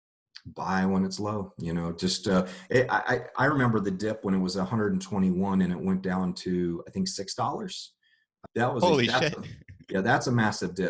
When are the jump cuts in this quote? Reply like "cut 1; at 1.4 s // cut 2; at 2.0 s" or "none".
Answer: cut 1; at 8.3 s